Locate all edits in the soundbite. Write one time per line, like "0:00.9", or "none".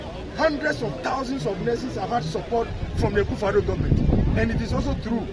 none